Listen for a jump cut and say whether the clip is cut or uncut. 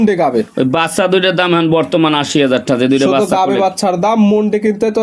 uncut